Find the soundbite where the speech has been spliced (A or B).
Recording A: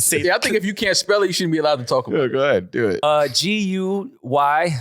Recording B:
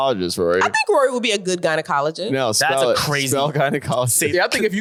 A